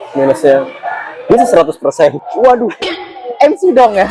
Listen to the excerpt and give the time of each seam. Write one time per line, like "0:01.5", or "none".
none